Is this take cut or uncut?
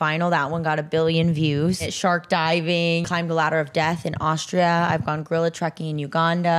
cut